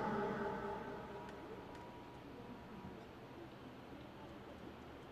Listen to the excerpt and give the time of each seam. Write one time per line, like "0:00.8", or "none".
none